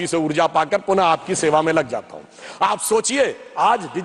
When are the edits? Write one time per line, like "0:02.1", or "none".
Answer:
none